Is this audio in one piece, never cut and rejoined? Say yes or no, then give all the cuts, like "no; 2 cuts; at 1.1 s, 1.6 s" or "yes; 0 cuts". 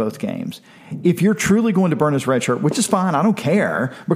yes; 0 cuts